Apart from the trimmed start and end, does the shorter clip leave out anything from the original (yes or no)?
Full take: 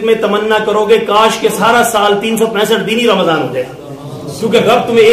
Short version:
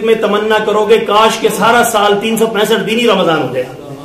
no